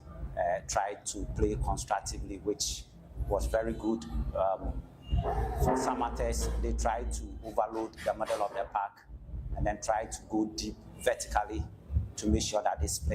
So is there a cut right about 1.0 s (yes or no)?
yes